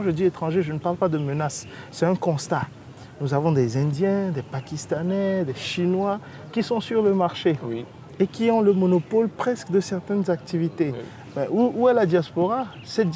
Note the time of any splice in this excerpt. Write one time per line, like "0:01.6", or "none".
none